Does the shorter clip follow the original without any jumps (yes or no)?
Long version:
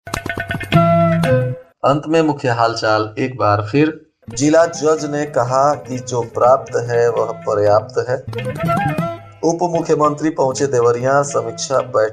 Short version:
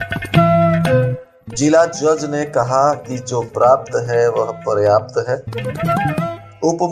no